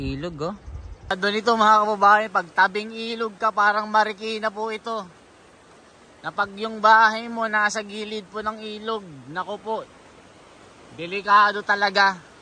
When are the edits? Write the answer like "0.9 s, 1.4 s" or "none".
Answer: 1.2 s

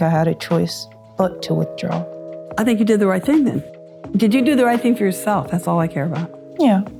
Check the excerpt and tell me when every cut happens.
none

